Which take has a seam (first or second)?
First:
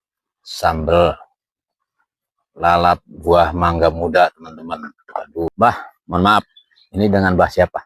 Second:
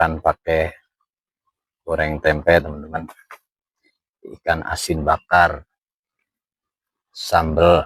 first